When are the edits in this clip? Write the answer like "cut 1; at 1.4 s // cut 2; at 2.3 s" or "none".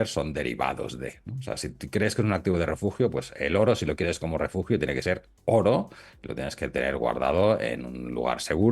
none